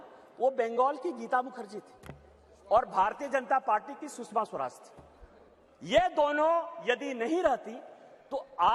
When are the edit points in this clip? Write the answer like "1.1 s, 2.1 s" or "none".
none

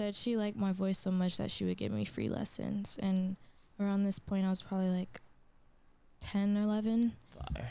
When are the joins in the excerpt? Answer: none

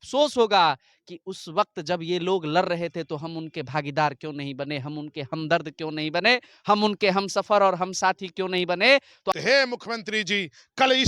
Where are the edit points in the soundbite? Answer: 9.3 s

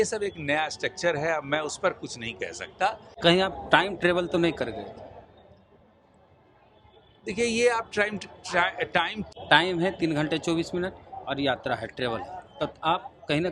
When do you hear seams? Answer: 3.1 s, 9.2 s

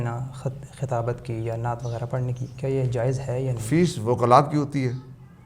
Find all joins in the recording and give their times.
3.6 s

